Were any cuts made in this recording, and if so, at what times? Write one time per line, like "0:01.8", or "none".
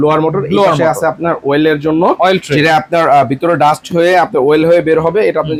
none